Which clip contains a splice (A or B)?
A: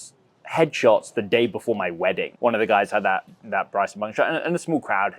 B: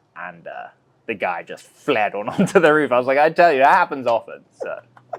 A